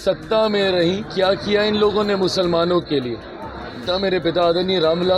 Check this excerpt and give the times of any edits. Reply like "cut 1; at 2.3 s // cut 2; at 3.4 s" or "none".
cut 1; at 3.9 s